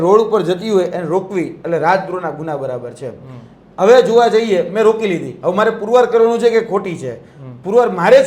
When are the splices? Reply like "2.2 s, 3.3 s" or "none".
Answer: none